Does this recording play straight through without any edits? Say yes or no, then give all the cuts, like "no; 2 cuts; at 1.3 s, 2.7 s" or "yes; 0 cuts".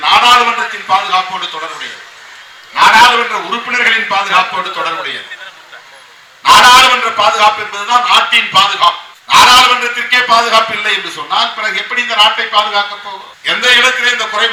yes; 0 cuts